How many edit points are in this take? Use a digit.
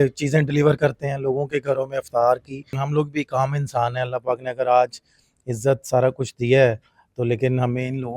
1